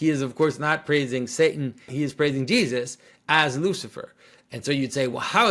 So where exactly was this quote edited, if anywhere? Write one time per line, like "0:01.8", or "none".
0:01.9